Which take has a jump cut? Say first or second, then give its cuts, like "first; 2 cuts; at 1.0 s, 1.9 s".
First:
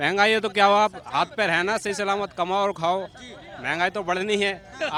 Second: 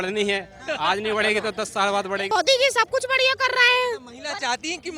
second; 1 cut; at 2.3 s